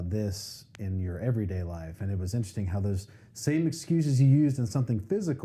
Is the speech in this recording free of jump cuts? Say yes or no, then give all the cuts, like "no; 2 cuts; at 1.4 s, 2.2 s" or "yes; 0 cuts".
yes; 0 cuts